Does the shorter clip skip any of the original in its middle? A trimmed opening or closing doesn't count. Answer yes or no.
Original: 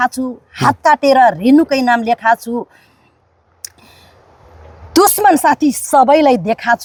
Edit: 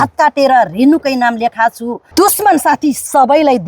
yes